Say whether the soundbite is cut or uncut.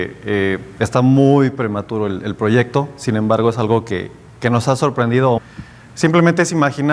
uncut